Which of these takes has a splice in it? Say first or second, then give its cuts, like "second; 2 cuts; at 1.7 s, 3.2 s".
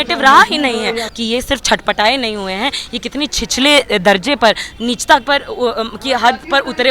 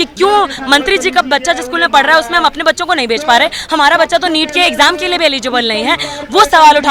first; 1 cut; at 1.1 s